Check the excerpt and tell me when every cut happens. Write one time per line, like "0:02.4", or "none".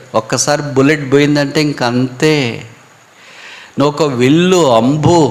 none